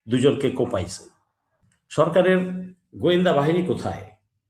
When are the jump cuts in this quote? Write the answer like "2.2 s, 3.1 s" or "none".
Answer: 1.5 s